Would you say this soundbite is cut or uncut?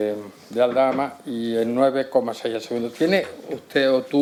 uncut